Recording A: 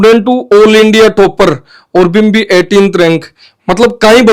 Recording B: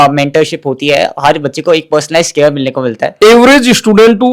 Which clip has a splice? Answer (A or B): B